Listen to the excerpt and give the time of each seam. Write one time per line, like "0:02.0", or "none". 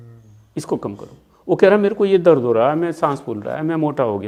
none